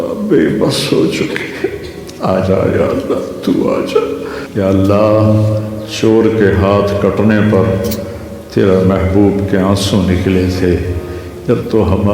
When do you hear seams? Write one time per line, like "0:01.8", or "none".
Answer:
0:04.4